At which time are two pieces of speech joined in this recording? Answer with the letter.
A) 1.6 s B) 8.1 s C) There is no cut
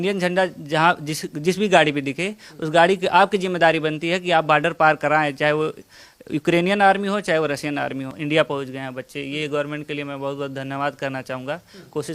B